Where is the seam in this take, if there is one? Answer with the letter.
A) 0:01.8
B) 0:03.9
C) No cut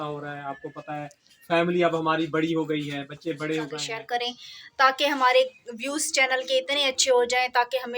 B